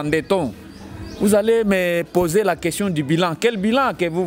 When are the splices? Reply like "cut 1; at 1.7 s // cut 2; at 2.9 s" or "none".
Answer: none